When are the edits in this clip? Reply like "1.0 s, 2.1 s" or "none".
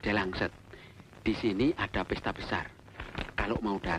none